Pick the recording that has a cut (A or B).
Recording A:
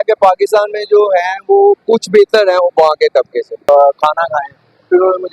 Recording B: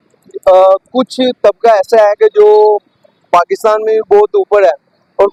A